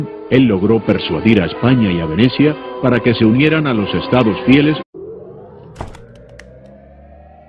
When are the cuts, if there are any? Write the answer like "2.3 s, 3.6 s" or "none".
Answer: none